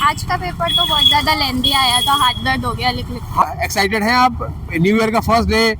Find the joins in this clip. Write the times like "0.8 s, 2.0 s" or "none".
3.4 s